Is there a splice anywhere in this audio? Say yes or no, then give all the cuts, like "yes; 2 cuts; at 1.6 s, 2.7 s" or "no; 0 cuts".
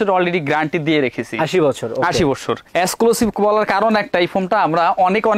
no; 0 cuts